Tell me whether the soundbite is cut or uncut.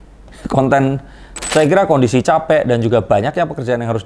cut